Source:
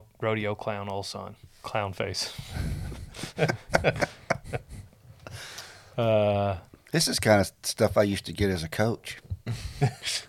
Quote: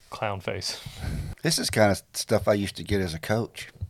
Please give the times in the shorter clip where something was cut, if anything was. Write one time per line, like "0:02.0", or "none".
0:01.2

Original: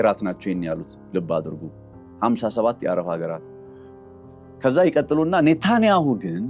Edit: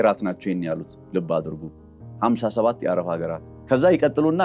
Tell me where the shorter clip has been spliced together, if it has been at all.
0:03.5

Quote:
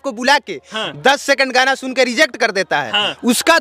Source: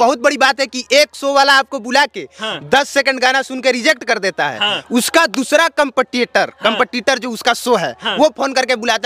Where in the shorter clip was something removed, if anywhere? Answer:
none

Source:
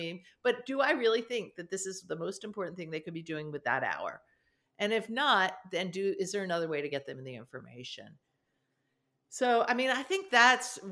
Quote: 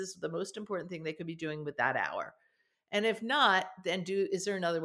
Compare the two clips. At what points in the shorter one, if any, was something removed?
none

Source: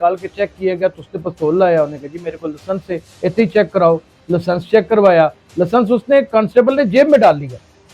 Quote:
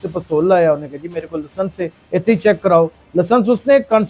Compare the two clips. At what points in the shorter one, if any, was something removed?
0:03.0

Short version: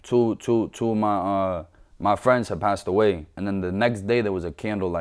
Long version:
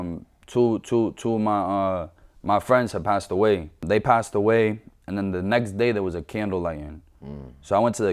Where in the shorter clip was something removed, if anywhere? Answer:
0:03.3

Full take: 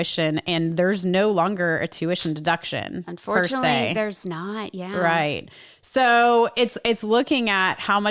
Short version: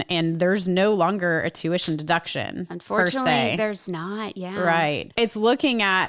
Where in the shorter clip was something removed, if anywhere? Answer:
0:05.1

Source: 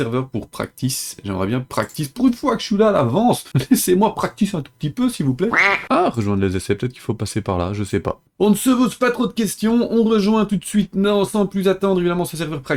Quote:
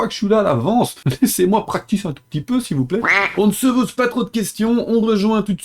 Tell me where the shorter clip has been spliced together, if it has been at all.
0:03.3

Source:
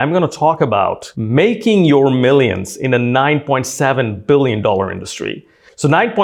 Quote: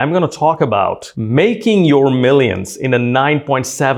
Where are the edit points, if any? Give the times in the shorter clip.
none

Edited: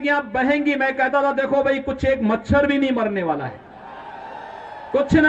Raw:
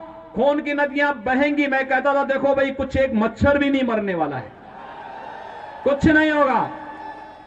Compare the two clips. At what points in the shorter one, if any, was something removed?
none

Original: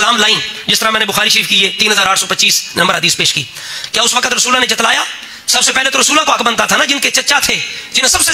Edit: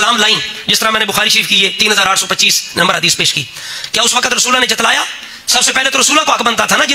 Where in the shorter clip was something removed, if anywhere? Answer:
none

